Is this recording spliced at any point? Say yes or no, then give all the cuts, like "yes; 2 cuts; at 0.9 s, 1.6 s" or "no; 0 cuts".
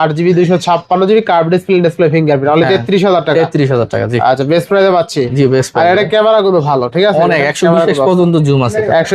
no; 0 cuts